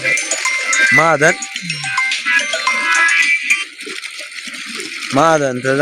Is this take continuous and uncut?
yes; 0 cuts

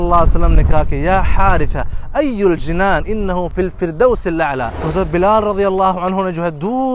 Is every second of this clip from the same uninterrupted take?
no; 2 cuts; at 3.5 s, 4.8 s

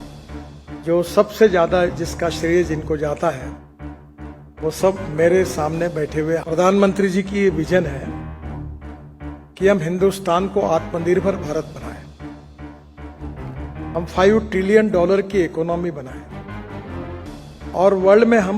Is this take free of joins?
no; 3 cuts; at 6.4 s, 16.2 s, 17.7 s

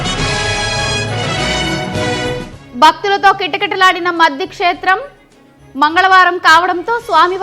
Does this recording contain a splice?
yes; 1 cut; at 2.5 s

